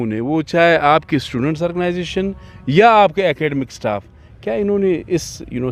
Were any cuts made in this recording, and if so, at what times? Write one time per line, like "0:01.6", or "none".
none

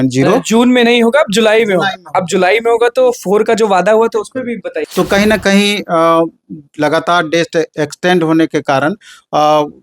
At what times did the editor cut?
0:04.8

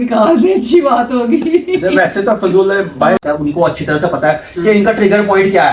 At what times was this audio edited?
0:03.2

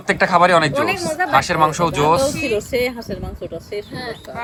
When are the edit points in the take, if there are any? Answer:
none

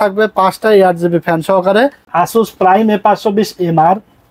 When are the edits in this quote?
0:02.0

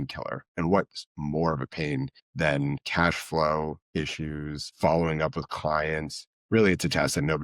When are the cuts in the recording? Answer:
0:02.3
0:04.6

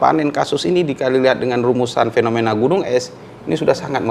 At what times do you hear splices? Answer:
none

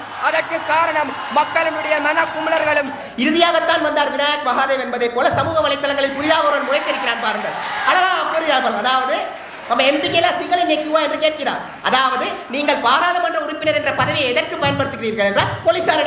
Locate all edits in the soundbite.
0:03.0

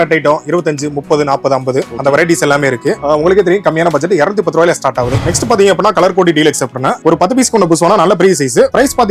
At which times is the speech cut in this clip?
none

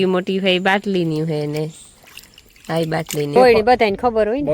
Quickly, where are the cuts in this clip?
0:03.4

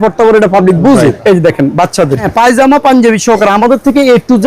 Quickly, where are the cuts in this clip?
0:01.2
0:02.3

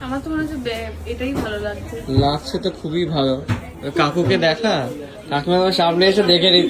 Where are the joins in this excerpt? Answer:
none

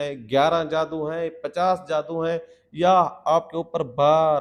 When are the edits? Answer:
none

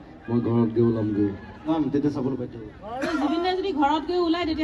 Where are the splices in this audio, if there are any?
0:01.8

